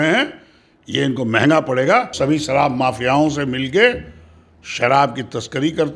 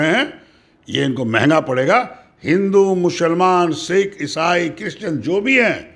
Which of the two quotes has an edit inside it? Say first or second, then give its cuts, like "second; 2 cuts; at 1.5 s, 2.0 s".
first; 1 cut; at 2.1 s